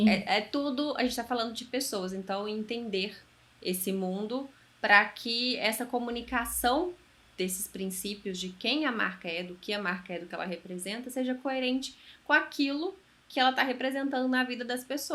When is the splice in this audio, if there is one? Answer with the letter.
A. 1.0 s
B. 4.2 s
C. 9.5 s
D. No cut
D